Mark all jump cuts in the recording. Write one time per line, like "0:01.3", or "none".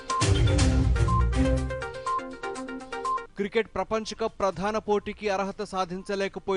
0:03.3